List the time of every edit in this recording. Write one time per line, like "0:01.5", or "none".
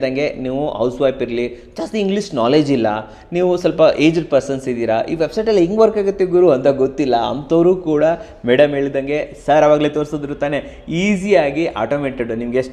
none